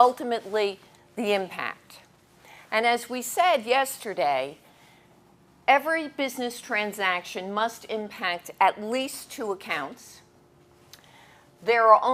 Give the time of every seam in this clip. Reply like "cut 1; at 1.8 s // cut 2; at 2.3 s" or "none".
cut 1; at 10.5 s